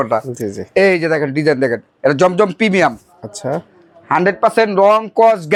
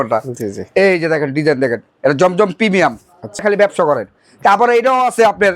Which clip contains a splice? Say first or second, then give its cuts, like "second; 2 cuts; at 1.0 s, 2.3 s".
second; 1 cut; at 3.4 s